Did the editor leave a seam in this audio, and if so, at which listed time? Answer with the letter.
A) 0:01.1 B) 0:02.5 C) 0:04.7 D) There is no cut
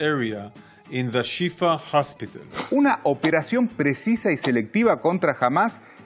D